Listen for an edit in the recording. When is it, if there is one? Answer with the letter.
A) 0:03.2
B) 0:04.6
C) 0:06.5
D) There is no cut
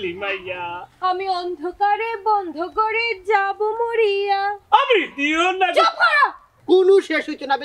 C